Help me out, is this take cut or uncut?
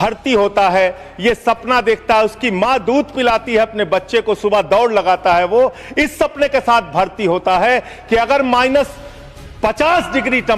uncut